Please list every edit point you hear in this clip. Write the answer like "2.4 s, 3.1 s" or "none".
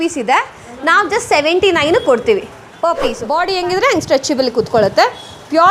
3.1 s